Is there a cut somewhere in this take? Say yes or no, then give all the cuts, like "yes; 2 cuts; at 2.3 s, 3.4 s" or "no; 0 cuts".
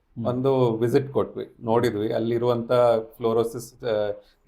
no; 0 cuts